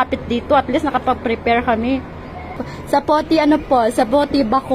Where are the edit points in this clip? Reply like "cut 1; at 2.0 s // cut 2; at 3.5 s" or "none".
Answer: cut 1; at 2.6 s